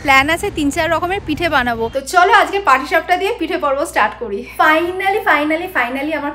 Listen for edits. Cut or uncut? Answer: cut